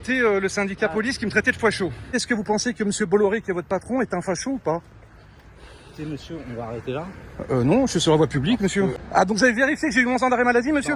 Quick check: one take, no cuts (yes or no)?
no